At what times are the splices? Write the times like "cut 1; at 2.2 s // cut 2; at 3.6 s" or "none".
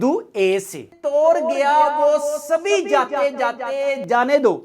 cut 1; at 0.9 s